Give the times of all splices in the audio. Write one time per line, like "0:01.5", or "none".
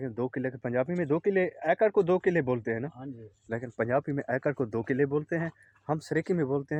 none